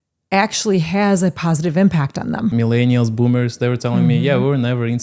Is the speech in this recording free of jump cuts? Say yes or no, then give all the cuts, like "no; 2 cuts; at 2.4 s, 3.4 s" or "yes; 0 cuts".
no; 1 cut; at 2.5 s